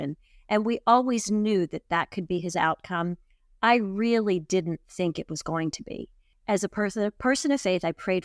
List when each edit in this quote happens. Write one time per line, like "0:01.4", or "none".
0:06.3